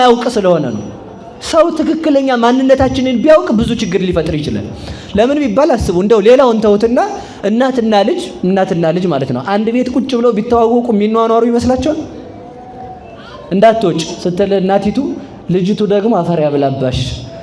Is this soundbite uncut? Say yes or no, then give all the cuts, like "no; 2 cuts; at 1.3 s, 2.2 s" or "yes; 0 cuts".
yes; 0 cuts